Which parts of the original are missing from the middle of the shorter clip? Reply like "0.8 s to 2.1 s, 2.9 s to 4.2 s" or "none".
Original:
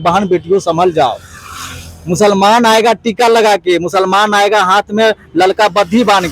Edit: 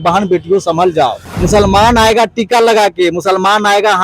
1.3 s to 2.0 s

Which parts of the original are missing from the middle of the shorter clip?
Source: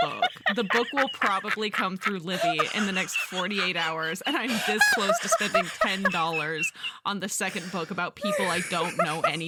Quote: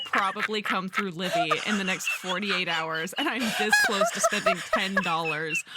none

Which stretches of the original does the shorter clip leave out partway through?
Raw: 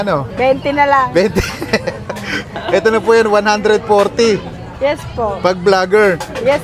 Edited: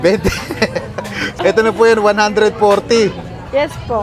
2.4 s to 2.5 s

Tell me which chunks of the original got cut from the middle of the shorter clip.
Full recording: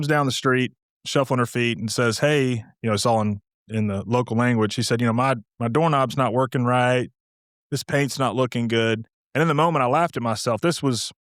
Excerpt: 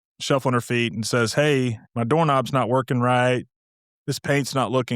2.7 s to 5.5 s

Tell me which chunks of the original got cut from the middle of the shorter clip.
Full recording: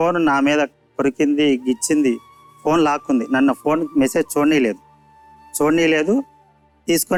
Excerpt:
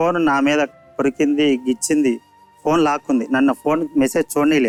none

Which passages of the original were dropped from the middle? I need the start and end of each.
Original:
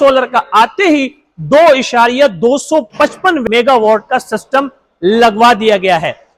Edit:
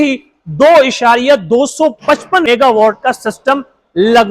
3.4 s to 3.5 s

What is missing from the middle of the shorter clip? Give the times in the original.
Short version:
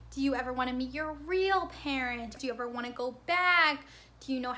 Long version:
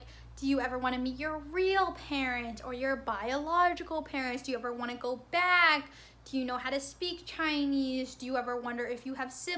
2.6 s to 4.4 s

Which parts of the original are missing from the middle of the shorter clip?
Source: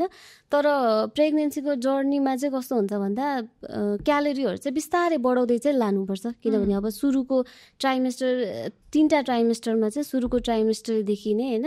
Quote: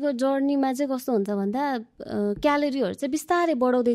none

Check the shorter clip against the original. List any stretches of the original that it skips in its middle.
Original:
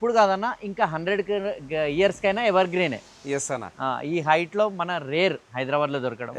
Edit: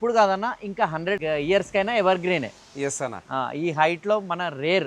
1.2 s to 1.7 s

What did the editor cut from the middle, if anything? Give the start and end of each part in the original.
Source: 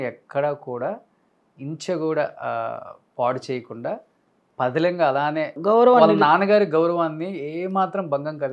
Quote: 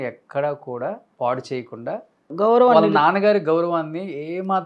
1.1 s to 3.0 s, 4.3 s to 5.5 s

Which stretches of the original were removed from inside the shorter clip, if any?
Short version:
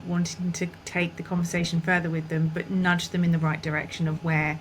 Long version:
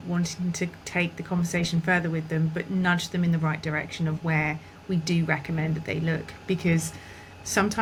none

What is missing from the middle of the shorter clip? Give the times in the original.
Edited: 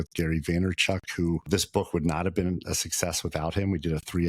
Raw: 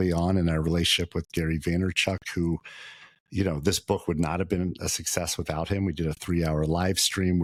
2.6 s to 3.6 s

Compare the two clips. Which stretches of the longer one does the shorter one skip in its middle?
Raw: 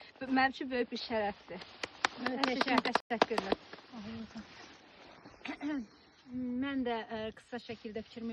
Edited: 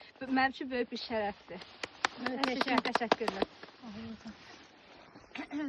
3.0 s to 3.1 s

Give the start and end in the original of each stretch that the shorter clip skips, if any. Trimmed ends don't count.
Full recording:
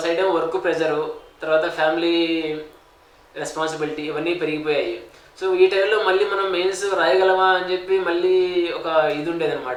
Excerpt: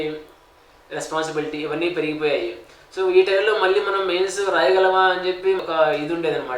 8.1 s to 8.8 s

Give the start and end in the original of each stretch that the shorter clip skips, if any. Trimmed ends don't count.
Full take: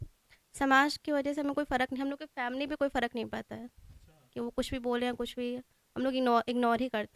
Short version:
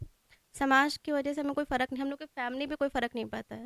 none

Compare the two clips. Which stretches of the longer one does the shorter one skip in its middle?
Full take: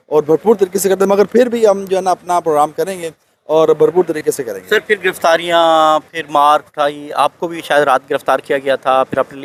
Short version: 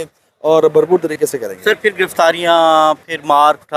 none

